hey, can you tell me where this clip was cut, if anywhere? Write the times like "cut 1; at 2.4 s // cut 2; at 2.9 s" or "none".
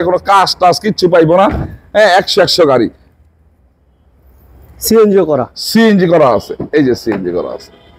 none